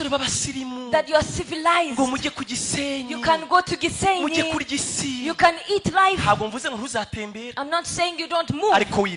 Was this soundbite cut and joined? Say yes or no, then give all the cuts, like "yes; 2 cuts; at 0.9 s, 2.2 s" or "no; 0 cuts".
no; 0 cuts